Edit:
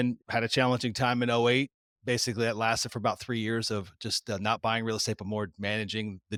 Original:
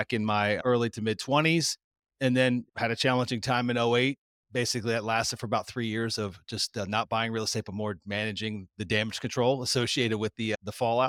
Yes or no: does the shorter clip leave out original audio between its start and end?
no